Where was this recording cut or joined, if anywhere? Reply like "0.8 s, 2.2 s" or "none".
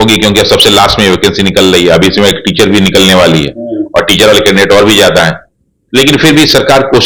none